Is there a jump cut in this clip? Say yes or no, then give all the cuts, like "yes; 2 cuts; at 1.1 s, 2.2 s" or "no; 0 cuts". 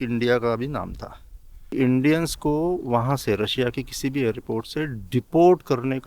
yes; 1 cut; at 1.5 s